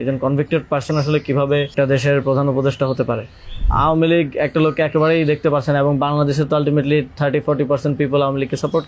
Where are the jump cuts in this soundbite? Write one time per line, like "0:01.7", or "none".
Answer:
0:01.7
0:03.6